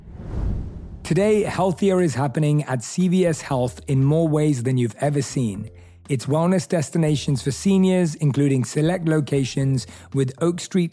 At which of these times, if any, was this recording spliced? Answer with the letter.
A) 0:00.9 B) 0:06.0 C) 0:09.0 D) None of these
A